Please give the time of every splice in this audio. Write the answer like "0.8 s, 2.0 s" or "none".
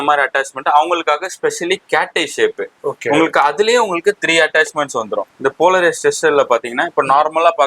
5.3 s